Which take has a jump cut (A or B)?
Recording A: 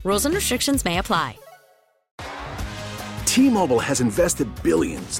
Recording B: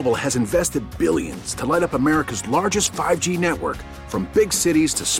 A